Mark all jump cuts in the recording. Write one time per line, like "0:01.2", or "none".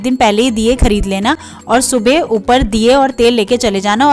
none